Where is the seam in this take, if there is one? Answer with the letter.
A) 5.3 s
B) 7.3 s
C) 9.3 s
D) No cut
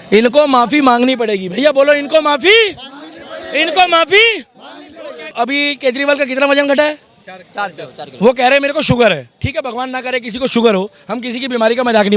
A